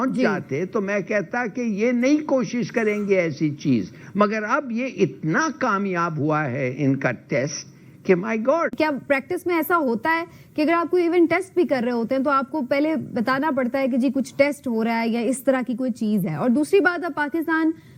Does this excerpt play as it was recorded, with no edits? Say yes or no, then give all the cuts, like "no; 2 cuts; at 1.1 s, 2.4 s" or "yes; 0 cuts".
yes; 0 cuts